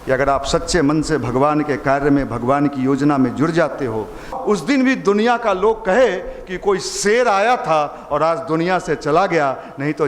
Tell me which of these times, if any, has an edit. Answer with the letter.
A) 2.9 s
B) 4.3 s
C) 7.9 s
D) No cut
B